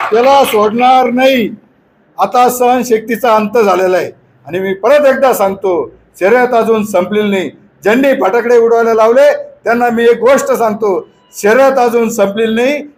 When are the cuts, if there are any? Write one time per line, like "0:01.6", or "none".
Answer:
none